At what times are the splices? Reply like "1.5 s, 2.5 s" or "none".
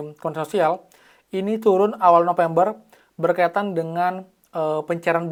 none